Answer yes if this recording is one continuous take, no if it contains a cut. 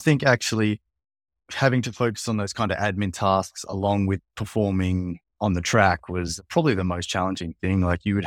yes